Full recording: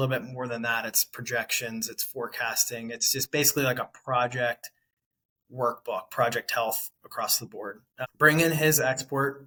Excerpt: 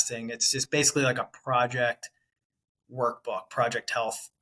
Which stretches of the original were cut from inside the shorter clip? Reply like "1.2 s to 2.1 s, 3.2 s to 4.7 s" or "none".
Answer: none

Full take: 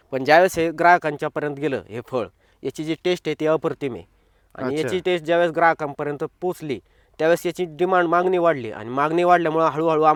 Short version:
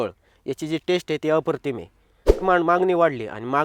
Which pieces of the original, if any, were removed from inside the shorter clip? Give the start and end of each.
4.6 s to 7.9 s

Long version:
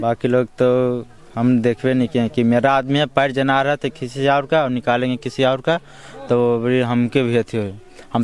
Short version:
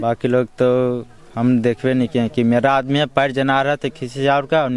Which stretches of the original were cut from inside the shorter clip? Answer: none

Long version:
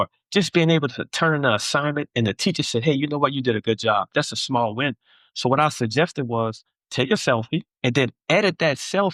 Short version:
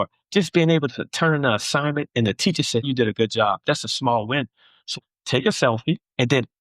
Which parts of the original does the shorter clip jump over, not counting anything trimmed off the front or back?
2.8 s to 3.3 s, 5.4 s to 6.5 s

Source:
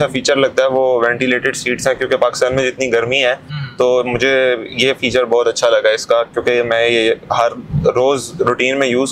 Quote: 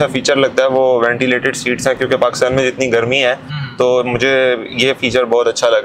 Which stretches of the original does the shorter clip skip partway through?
none

